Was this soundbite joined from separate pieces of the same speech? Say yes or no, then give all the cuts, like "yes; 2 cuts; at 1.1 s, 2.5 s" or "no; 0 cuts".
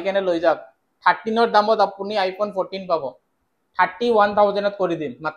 no; 0 cuts